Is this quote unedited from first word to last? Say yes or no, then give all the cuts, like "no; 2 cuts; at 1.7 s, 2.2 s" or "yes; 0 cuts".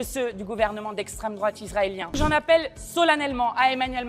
no; 1 cut; at 2.2 s